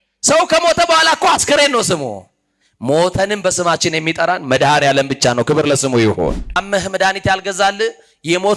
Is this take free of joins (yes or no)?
no